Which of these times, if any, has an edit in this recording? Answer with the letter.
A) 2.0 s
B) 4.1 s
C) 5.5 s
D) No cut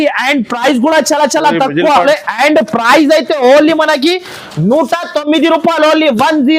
A